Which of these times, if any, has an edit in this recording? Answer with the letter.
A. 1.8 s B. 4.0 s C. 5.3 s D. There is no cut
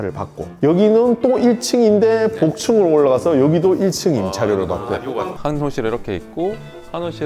C